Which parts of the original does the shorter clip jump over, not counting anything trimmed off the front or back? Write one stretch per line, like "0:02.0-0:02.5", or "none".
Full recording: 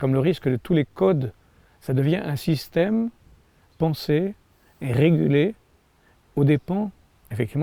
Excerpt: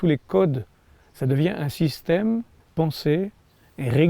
0:03.3-0:03.6